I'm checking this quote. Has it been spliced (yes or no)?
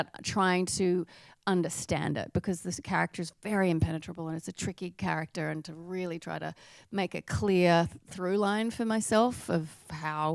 no